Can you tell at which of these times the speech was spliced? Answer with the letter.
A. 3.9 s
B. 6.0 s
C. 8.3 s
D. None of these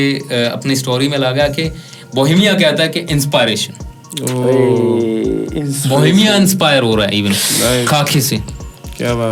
D